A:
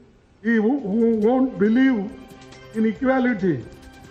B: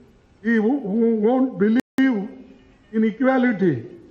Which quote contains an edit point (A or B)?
B